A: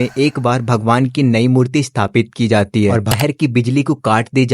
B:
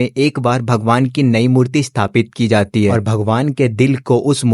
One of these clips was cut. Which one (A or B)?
A